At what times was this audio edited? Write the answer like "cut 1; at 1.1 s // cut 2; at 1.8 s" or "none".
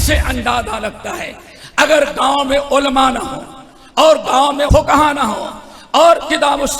cut 1; at 4.7 s